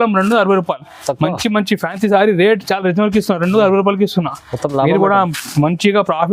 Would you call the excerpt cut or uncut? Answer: uncut